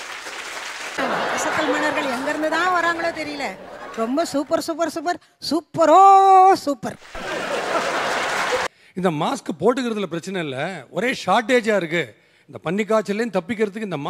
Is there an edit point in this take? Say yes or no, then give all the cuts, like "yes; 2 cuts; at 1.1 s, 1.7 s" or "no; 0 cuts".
yes; 2 cuts; at 1.0 s, 8.7 s